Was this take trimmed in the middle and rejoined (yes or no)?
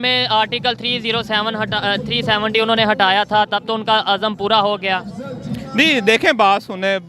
no